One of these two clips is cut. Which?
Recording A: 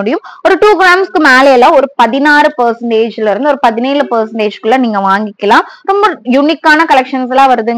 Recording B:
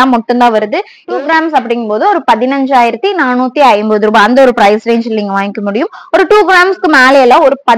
B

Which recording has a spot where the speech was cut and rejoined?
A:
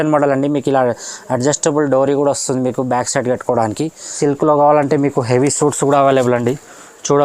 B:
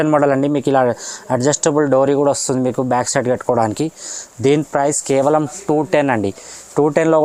A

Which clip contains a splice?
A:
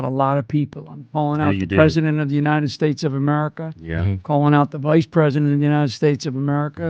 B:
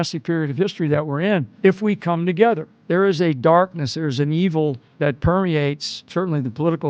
B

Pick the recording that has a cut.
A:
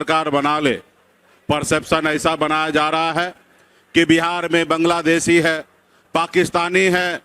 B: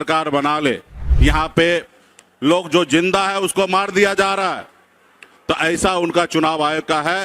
B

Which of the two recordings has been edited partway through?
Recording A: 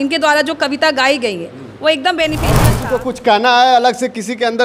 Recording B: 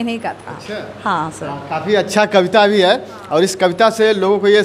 A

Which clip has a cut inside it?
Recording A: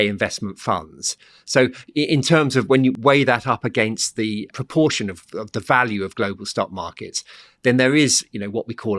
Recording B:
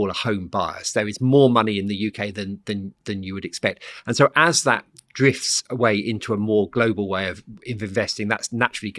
A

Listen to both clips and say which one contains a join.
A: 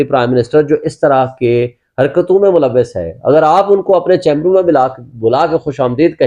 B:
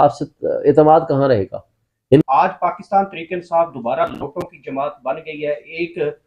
B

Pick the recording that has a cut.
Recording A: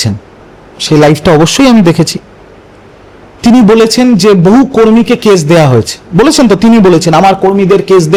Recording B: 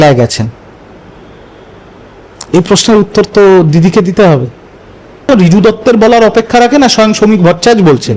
B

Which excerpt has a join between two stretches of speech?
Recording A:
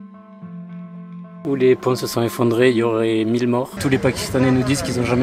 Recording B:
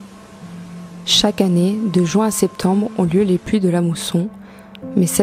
A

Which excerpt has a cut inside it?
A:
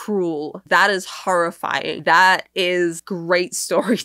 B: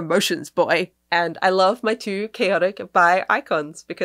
B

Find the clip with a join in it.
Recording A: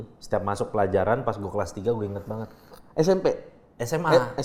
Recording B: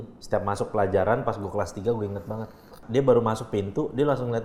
B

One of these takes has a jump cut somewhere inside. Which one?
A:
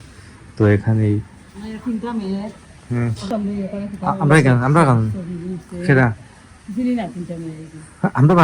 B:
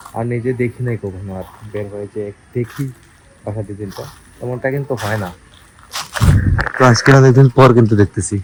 A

